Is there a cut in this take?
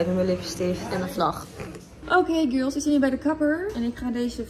yes; 2 cuts; at 0.8 s, 1.9 s

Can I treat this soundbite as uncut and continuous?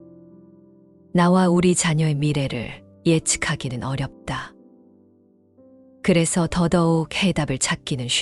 no; 1 cut; at 0.9 s

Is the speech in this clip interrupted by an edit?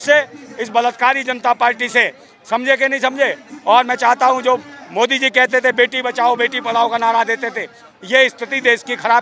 no; 0 cuts

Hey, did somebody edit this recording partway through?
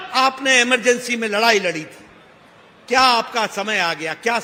no; 0 cuts

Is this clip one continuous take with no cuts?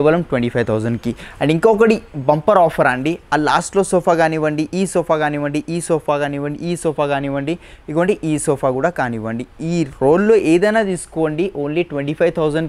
yes; 0 cuts

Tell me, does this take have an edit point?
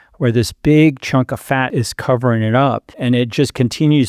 yes; 2 cuts; at 1.7 s, 2.9 s

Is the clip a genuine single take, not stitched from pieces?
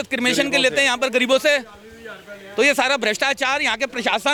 yes; 0 cuts

